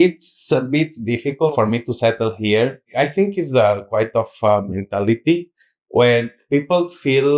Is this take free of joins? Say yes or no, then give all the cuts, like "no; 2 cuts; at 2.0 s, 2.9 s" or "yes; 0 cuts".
no; 2 cuts; at 1.5 s, 2.9 s